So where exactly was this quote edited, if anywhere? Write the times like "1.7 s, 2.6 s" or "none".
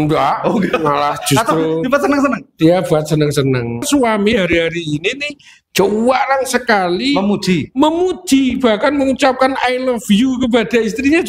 3.9 s